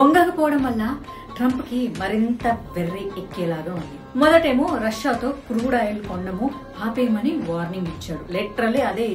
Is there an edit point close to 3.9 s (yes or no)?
yes